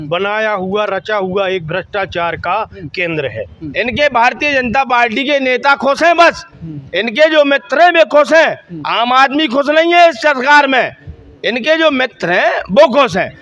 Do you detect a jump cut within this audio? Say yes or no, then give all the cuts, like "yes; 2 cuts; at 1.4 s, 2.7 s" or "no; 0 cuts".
yes; 1 cut; at 3.6 s